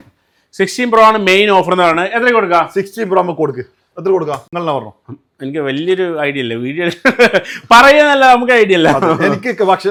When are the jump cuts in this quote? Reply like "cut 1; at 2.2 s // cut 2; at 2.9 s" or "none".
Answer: none

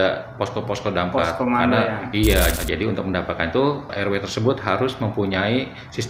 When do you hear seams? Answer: cut 1; at 2.5 s // cut 2; at 3.9 s

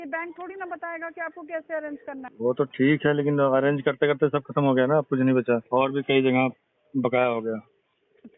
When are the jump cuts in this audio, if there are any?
cut 1; at 2.3 s // cut 2; at 5.6 s

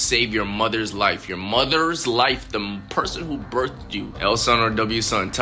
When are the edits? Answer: cut 1; at 4.1 s

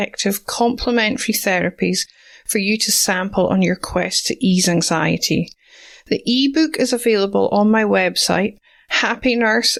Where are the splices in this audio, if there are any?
none

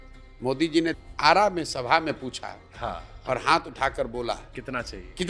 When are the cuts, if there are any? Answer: cut 1; at 1.0 s

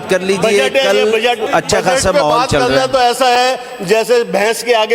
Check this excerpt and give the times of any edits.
cut 1; at 1.4 s

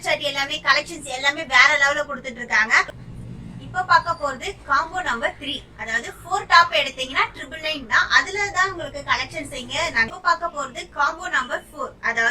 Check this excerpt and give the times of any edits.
cut 1; at 3.0 s // cut 2; at 10.1 s

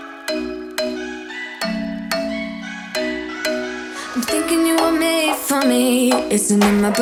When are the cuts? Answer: none

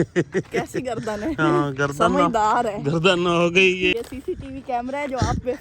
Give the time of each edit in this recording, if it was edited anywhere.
cut 1; at 3.9 s

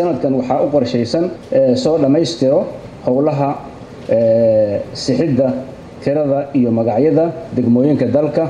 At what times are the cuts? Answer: cut 1; at 1.4 s

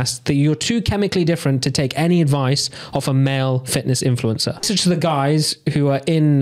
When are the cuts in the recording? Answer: cut 1; at 4.6 s

